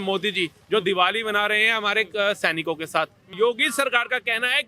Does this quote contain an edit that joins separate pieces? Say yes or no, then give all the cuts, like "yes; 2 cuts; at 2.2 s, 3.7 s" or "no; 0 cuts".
yes; 1 cut; at 3.3 s